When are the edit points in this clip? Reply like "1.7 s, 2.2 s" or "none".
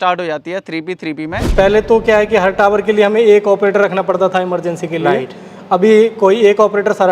1.5 s